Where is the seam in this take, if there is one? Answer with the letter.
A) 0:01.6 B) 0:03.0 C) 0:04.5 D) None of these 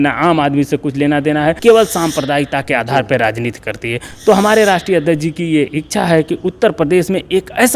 A